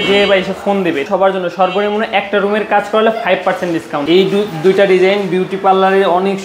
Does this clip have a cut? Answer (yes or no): yes